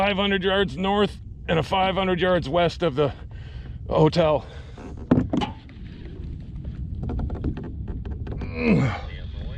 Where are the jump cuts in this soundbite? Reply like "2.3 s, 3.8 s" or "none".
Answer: none